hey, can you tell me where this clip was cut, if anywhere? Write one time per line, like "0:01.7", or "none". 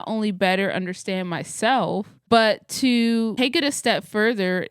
0:02.1